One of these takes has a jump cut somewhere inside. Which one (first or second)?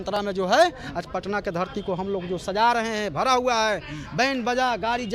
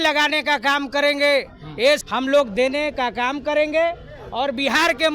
second